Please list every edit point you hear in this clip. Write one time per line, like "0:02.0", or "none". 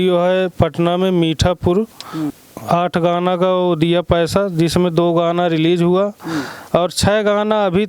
0:02.2